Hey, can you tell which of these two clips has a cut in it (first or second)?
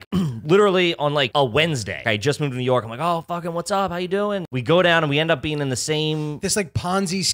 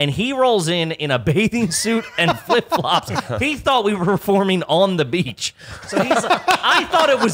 first